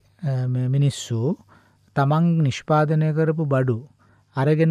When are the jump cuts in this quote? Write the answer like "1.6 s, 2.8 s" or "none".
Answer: none